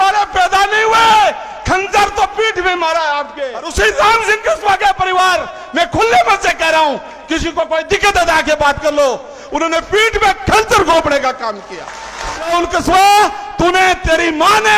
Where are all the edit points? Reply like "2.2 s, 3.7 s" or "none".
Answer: 3.6 s, 12.5 s

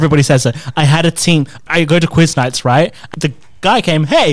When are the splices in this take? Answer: 1.6 s, 3.0 s

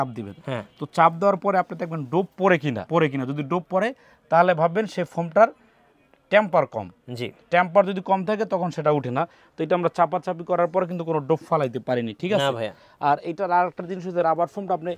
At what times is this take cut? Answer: 2.8 s

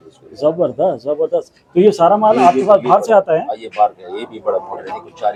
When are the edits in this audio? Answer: none

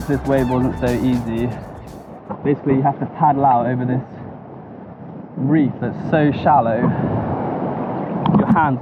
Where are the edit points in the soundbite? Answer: none

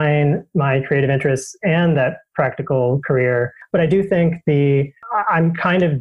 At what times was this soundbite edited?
3.6 s

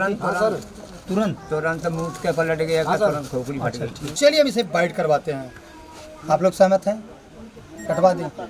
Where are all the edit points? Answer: 4.1 s

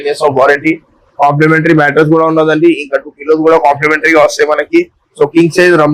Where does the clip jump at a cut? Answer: none

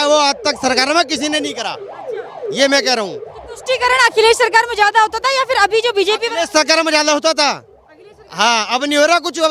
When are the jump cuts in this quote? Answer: none

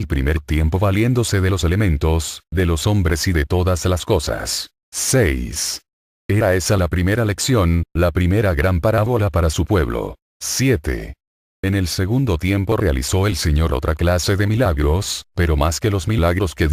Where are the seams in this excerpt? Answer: 3.4 s

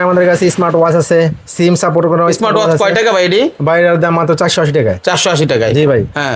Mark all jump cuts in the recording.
none

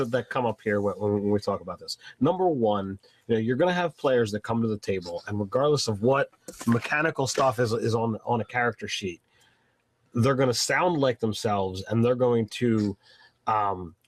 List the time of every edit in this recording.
none

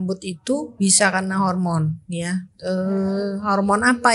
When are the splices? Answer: none

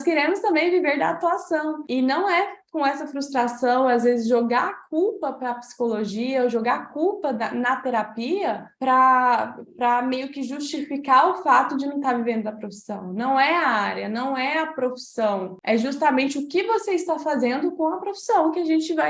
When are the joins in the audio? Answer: none

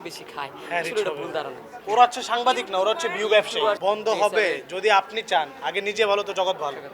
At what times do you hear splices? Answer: 1.8 s, 3.8 s

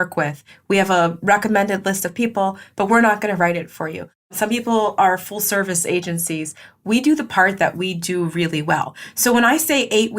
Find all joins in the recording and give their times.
4.3 s

